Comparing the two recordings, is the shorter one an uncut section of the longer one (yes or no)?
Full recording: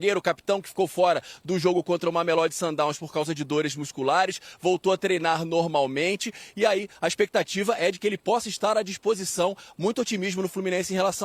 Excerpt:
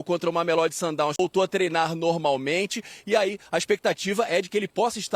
no